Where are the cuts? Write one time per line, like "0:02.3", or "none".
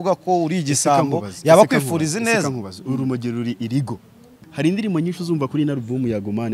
0:04.4